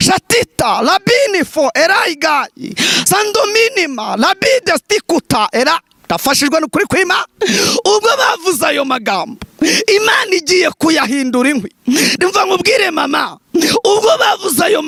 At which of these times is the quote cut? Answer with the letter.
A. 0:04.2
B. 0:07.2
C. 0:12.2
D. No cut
D